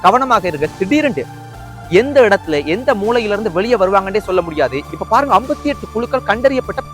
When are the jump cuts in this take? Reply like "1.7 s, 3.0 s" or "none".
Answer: 4.9 s